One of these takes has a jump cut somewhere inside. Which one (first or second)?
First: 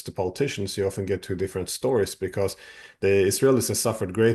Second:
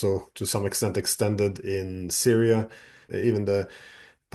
second